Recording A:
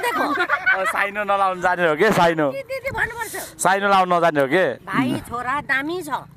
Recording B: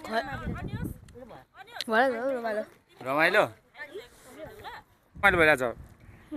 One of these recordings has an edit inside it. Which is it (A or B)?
B